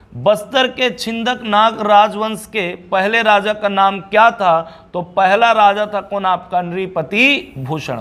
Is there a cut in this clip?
no; 0 cuts

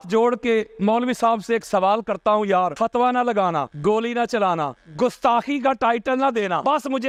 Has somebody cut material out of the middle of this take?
no; 0 cuts

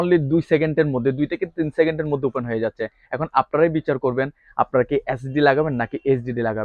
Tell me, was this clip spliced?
no; 0 cuts

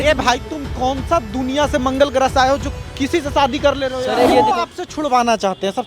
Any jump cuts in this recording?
yes; 1 cut; at 4.3 s

